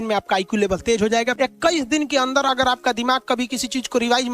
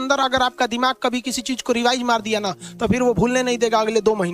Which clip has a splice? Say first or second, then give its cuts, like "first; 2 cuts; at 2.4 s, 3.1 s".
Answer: first; 1 cut; at 1.3 s